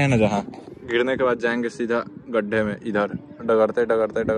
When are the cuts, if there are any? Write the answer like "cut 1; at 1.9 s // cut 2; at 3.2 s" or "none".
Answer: none